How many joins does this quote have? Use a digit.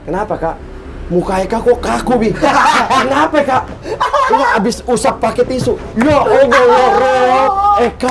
0